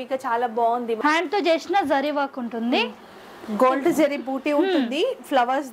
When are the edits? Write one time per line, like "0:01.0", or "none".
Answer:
0:01.0